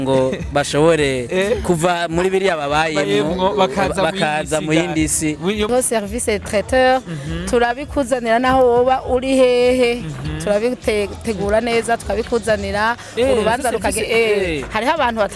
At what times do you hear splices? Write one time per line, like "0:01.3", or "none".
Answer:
0:05.7

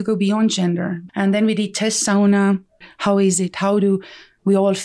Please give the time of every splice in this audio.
0:01.0
0:02.9

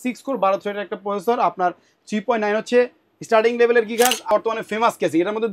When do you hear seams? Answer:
0:04.3

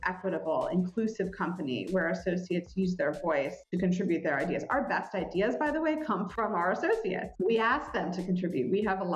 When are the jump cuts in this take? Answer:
0:06.3

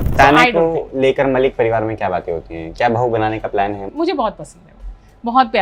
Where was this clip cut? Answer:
0:03.8

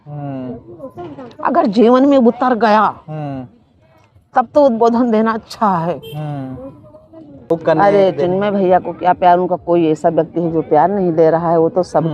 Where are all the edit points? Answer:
0:07.6

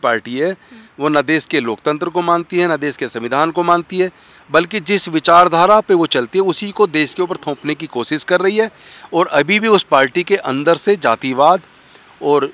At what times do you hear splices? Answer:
none

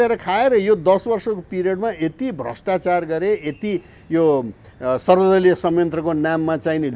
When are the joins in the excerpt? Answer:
none

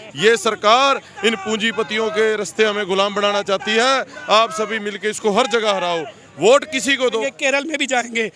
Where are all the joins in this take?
0:07.0

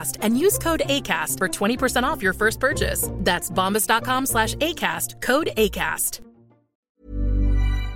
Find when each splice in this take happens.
0:07.0

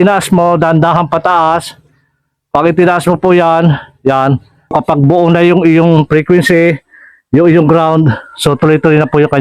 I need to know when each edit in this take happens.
0:04.7

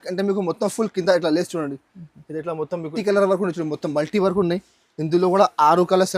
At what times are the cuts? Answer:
0:02.9

